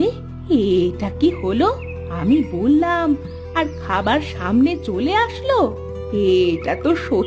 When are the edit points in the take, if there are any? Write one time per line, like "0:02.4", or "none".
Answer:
none